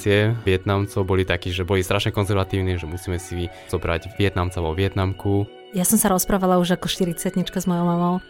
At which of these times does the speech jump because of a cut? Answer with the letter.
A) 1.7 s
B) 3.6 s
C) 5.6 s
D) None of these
C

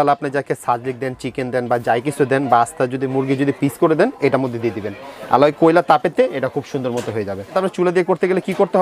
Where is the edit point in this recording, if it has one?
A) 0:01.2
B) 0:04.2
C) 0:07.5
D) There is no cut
C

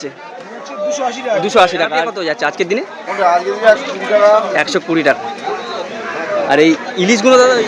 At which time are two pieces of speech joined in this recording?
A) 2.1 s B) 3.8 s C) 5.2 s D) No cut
A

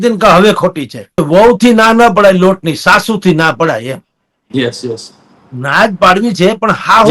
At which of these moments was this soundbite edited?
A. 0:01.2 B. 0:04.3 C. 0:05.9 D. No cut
A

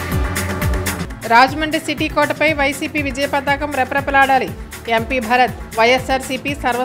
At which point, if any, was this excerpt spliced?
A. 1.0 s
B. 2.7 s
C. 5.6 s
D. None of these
A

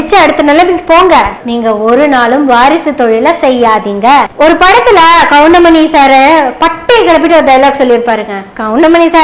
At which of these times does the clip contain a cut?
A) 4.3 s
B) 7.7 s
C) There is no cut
A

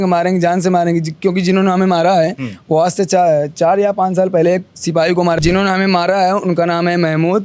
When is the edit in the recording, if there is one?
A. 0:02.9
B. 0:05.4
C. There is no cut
B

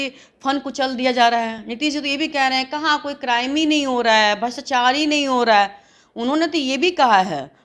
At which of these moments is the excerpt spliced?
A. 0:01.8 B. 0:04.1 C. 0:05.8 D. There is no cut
D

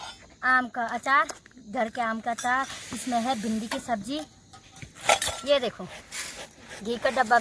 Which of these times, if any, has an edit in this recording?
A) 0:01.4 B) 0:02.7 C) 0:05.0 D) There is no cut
D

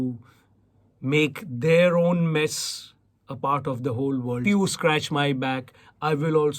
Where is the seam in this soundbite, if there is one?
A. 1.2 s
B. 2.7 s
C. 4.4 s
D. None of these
C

